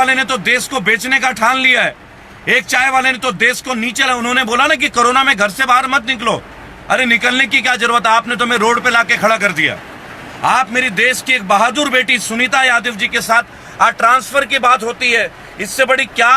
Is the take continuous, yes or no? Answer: yes